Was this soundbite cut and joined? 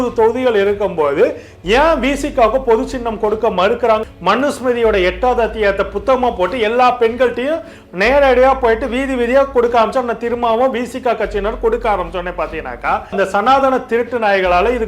yes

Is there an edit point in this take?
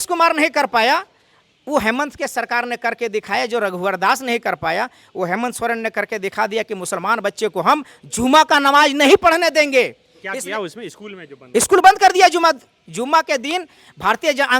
no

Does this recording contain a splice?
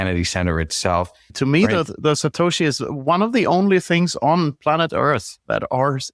yes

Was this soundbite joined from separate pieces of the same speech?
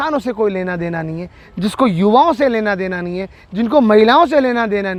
no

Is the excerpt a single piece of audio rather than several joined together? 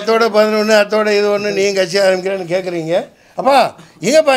no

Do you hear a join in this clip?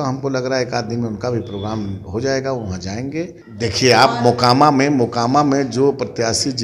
yes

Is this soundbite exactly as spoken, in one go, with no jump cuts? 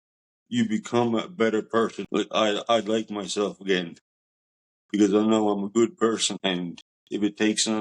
yes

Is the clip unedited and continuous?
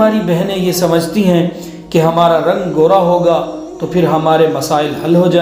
yes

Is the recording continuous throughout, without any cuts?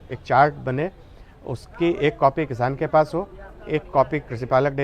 yes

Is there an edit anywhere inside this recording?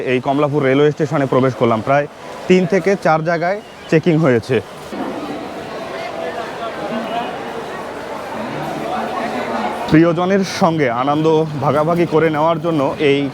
no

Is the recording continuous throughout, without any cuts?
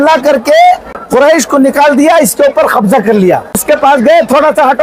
no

